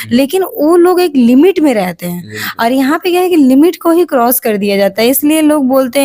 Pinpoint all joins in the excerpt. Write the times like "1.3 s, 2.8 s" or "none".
none